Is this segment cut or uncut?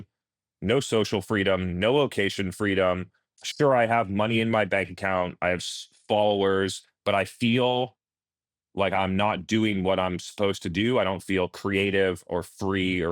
cut